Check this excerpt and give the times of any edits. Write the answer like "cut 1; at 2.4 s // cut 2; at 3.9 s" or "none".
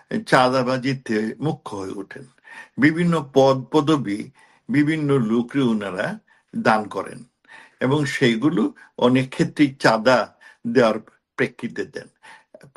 none